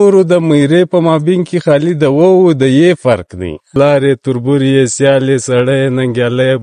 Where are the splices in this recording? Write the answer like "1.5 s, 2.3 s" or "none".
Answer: 3.7 s